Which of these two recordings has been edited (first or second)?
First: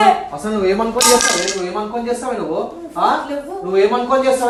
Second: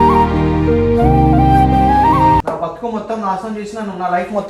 second